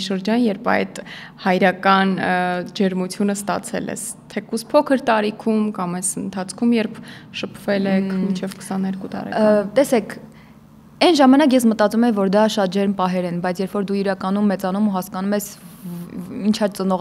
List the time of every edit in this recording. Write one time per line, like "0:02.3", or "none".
none